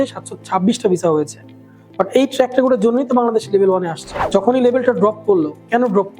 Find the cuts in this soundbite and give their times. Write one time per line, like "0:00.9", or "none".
0:04.2